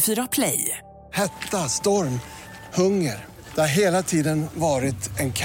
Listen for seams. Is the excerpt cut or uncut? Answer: uncut